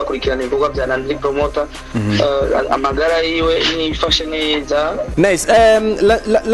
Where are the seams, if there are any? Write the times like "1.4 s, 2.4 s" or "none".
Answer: 5.1 s